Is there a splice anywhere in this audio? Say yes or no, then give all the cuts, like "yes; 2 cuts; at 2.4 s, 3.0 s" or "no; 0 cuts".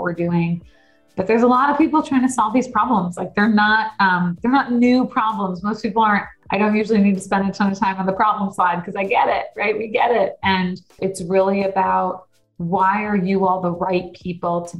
yes; 2 cuts; at 6.3 s, 10.9 s